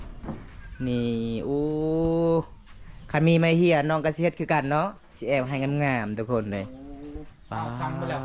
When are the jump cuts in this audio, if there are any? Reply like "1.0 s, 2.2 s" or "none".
none